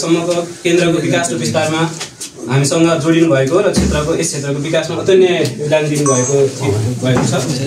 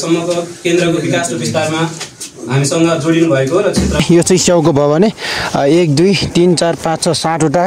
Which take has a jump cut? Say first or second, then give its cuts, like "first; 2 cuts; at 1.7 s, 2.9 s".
second; 1 cut; at 4.0 s